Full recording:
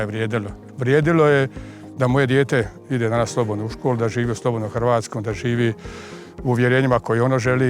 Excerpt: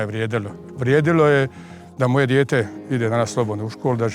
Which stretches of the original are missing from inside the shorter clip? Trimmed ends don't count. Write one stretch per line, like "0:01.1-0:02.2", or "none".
none